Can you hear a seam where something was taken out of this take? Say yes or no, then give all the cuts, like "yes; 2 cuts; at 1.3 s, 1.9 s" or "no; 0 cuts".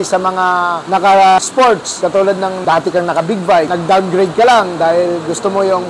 no; 0 cuts